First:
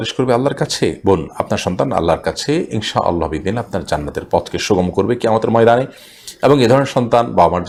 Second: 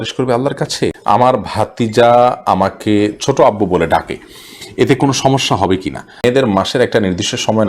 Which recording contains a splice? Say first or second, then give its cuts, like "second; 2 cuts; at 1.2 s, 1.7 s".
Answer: second; 2 cuts; at 1.0 s, 6.2 s